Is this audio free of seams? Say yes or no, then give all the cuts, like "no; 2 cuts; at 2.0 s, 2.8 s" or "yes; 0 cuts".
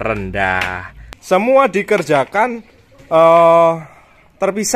no; 1 cut; at 1.1 s